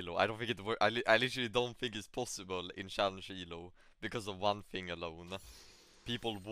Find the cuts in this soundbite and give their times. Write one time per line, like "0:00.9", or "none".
none